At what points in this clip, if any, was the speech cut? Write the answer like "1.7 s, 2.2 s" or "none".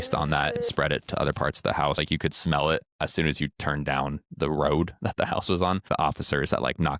2.0 s, 2.9 s, 5.8 s

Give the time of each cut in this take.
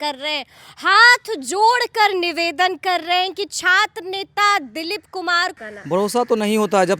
5.5 s

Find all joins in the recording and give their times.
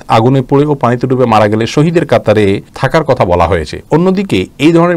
2.7 s

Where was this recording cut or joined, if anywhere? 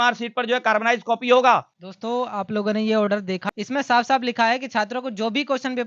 none

